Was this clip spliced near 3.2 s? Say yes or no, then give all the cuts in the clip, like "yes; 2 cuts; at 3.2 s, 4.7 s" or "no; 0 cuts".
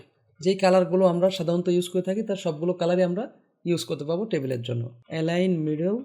no; 1 cut; at 4.9 s